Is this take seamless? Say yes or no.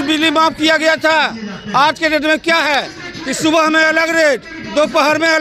yes